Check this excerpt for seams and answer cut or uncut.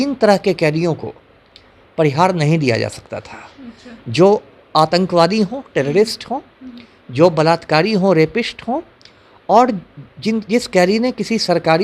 uncut